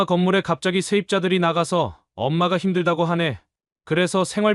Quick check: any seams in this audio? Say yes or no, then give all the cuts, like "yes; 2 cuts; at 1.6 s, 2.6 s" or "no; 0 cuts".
no; 0 cuts